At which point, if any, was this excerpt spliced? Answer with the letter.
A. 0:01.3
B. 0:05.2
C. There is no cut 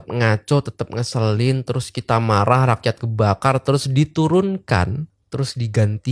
B